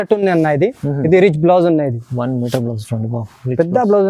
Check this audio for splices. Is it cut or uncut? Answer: uncut